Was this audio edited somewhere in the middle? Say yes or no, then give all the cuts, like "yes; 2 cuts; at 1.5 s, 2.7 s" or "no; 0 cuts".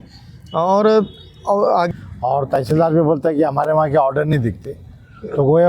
yes; 1 cut; at 1.9 s